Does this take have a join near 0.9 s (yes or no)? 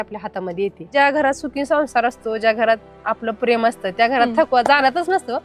yes